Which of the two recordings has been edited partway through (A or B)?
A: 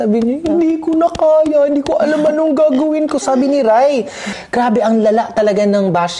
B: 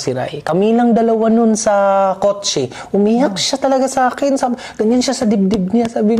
A